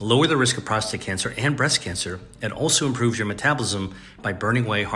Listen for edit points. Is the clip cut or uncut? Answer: uncut